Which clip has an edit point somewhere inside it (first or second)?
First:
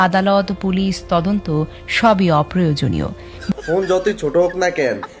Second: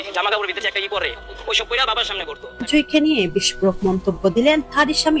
first